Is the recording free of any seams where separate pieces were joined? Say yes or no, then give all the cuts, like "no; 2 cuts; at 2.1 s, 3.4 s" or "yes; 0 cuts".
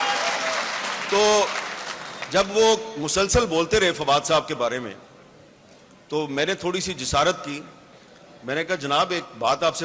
yes; 0 cuts